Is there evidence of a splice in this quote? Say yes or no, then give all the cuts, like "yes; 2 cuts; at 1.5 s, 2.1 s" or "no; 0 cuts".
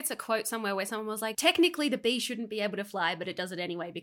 yes; 1 cut; at 1.3 s